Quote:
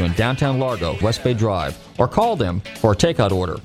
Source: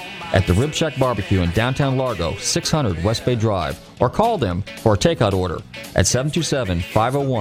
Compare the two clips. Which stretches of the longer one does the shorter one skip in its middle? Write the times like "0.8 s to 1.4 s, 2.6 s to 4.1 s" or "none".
2.4 s to 3.0 s